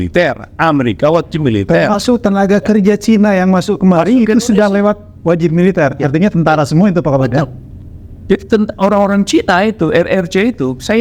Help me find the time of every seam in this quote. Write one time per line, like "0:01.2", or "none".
none